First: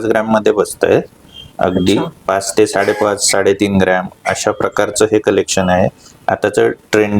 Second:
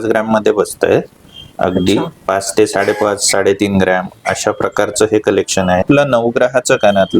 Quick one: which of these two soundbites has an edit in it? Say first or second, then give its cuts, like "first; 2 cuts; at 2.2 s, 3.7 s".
second; 1 cut; at 5.8 s